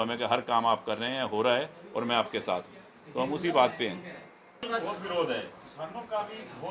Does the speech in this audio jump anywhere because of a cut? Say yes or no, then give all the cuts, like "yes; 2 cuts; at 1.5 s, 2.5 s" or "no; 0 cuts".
yes; 1 cut; at 4.6 s